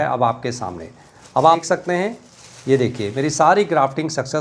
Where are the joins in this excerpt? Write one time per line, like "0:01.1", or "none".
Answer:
0:01.6